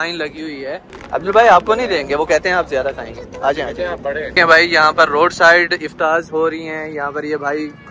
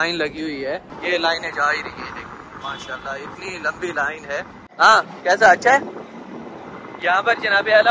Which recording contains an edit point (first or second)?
first